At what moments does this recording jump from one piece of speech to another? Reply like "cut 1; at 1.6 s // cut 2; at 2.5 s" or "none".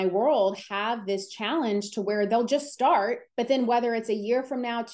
cut 1; at 3.2 s